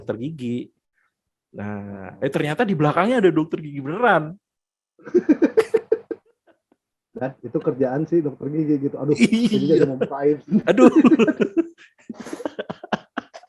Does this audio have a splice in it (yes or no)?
no